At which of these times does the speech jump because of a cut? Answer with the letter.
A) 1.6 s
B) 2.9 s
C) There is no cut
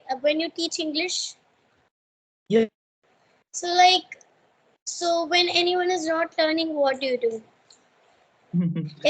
B